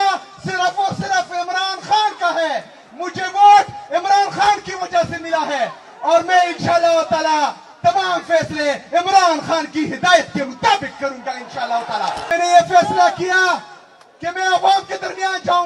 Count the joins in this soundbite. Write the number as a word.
one